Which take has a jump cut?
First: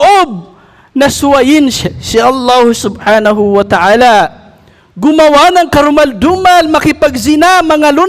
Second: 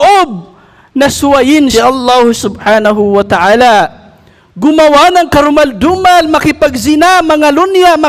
second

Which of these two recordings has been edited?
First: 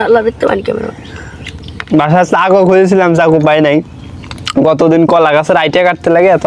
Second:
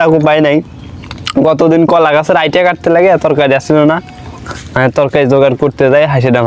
first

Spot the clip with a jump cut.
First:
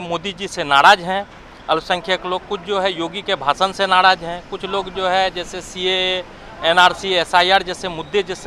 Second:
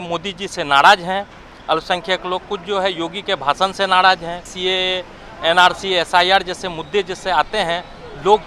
second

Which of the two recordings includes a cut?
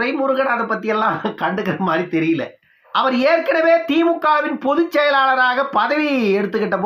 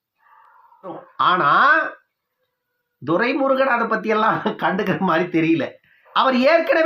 second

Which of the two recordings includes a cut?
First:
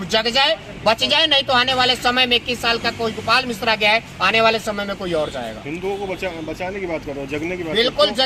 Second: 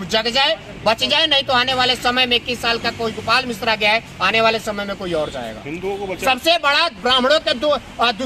second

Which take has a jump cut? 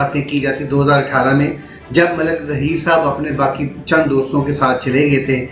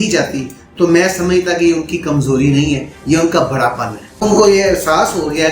second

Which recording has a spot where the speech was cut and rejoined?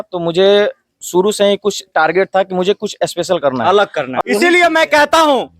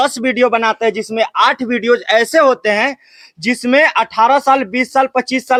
first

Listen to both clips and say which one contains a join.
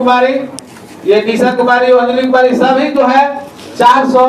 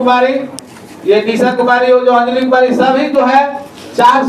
first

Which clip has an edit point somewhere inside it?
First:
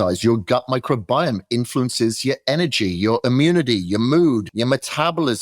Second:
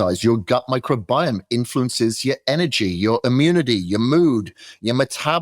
first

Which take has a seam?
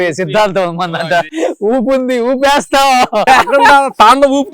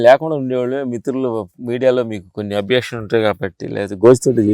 first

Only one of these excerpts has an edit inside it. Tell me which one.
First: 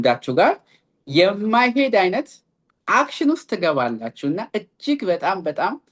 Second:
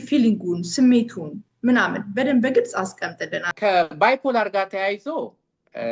second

